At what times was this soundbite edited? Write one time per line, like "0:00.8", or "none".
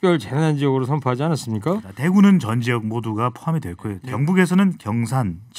0:01.9
0:04.0